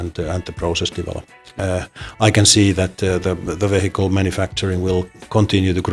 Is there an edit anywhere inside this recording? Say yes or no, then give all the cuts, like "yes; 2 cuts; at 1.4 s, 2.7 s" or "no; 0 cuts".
yes; 1 cut; at 1.5 s